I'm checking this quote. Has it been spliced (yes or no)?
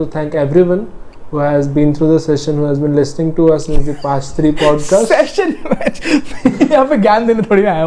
no